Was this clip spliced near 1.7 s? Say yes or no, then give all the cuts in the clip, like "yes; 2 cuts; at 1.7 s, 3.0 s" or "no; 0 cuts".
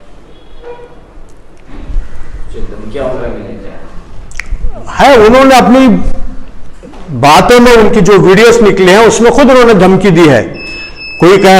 yes; 1 cut; at 1.7 s